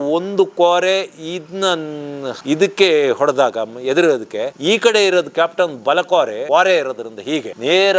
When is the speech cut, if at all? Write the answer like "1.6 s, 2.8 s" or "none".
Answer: none

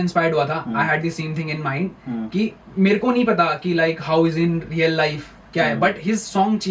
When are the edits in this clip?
none

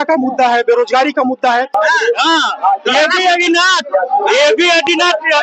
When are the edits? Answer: 1.7 s

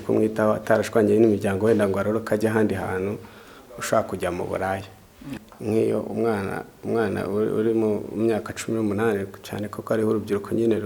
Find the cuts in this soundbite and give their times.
5.3 s

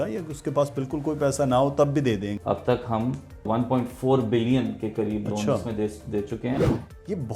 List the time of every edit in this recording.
2.3 s, 3.5 s, 6.6 s

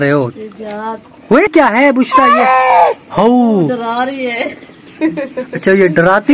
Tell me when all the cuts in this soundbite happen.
1.8 s

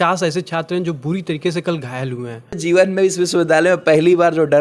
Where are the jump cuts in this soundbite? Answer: 2.6 s

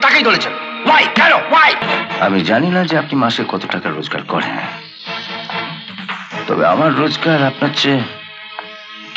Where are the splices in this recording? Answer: 1.9 s

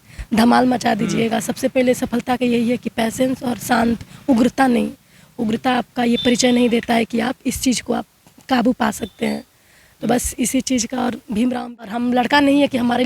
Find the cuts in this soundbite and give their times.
12.0 s

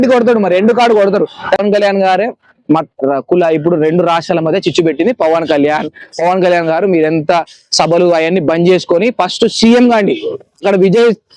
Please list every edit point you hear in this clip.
1.6 s

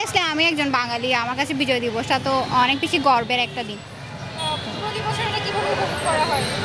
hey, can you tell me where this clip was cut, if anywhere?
none

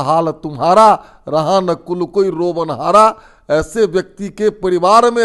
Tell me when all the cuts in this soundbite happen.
none

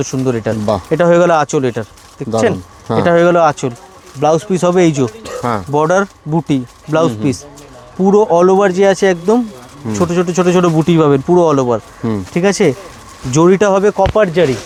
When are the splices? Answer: none

